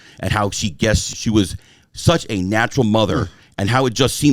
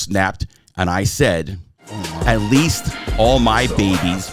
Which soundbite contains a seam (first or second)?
first